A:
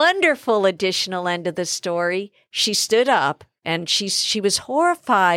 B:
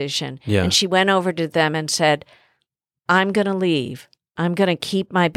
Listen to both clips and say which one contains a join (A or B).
A